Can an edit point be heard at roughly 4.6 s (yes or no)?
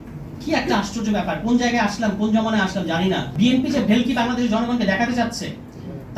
no